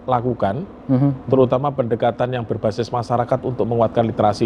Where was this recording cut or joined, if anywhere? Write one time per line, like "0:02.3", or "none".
none